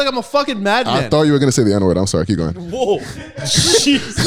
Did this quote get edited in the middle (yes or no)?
no